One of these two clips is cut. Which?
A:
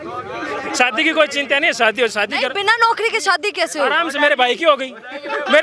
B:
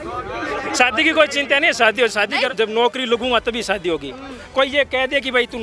B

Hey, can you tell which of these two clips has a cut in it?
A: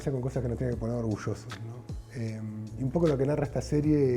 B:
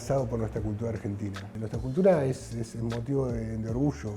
B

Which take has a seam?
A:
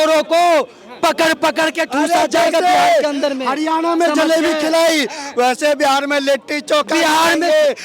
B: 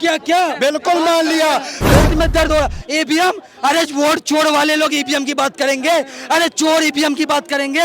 B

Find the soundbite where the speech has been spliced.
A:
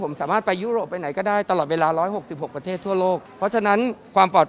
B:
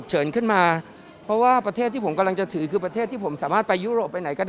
A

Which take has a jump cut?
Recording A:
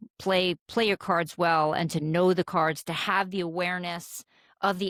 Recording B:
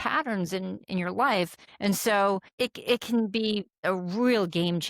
B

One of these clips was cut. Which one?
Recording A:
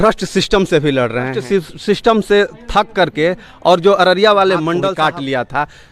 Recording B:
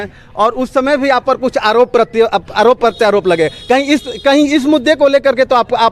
A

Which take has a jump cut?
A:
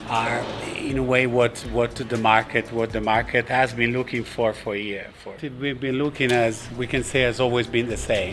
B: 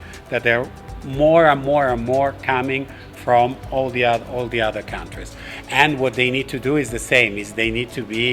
A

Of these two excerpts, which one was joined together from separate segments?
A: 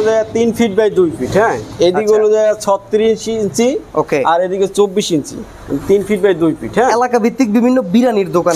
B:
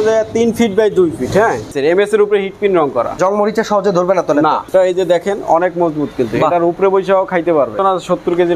B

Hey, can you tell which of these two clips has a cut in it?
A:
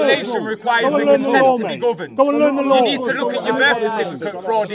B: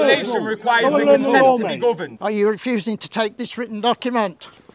B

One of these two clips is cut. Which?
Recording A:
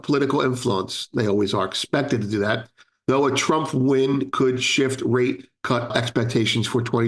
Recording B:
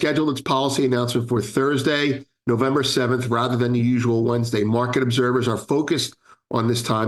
A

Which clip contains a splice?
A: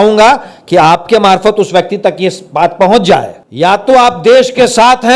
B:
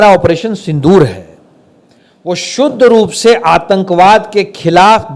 A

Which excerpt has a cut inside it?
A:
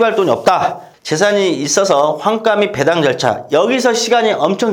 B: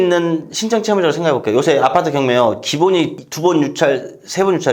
A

